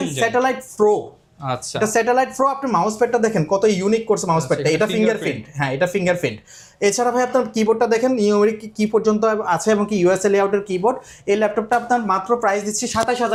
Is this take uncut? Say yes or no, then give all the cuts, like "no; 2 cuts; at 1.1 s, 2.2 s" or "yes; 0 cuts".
yes; 0 cuts